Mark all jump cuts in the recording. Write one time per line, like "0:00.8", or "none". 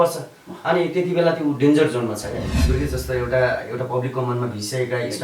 0:02.7